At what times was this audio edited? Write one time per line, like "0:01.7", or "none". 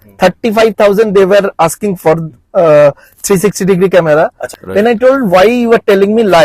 0:04.6